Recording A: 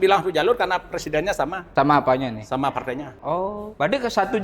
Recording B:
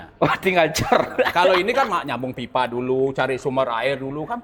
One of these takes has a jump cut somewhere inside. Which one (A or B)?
A